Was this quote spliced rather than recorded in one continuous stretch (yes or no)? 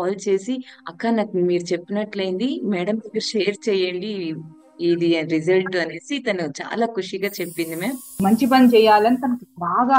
yes